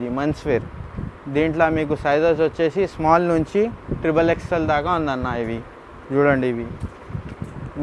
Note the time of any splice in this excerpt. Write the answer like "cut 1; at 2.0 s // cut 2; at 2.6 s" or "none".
none